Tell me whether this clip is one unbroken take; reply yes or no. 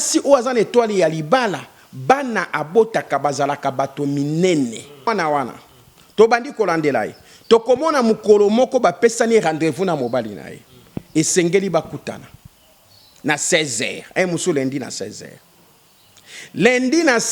no